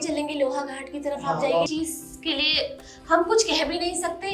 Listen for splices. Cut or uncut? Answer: cut